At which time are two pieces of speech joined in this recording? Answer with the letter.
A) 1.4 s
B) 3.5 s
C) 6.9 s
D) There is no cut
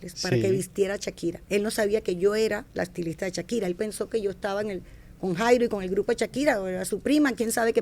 A